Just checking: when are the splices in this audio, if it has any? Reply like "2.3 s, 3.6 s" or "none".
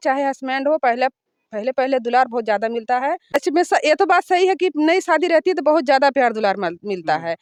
none